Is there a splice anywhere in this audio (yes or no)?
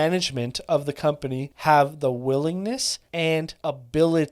yes